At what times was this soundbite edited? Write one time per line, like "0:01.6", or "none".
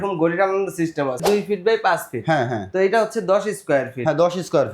0:01.2